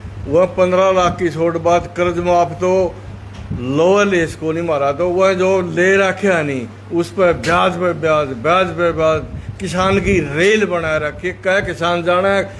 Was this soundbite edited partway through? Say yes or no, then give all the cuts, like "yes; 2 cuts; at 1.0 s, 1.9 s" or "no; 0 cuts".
no; 0 cuts